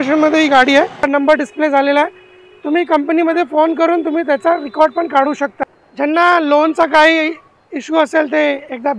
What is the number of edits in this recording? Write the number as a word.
two